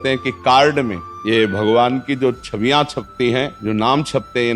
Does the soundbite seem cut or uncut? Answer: cut